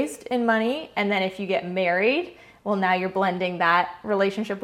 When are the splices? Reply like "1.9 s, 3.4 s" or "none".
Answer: none

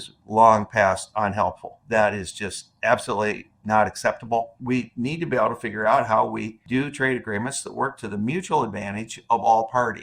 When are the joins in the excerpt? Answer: 1.8 s, 4.6 s, 6.6 s

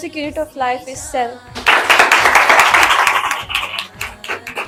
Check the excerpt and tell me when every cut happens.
none

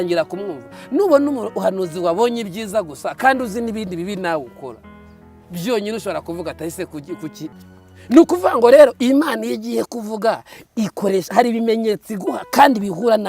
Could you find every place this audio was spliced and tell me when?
7.6 s

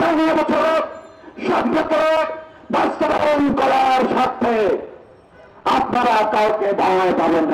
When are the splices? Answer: none

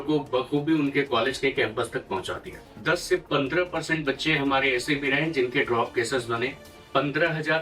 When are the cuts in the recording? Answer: 2.7 s, 6.7 s

